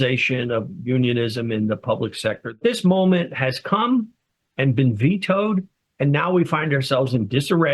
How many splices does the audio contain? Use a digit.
1